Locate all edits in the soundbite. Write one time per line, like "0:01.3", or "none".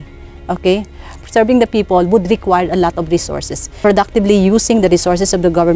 0:01.1
0:03.8